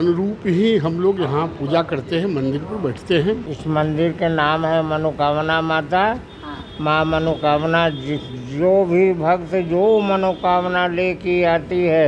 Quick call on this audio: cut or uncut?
cut